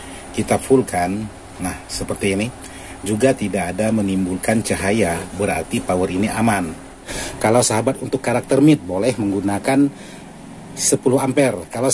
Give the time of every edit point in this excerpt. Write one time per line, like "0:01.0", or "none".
0:07.2